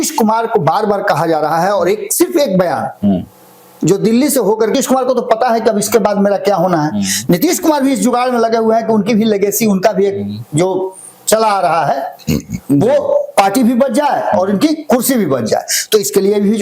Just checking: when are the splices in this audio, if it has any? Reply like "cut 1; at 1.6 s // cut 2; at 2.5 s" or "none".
cut 1; at 4.7 s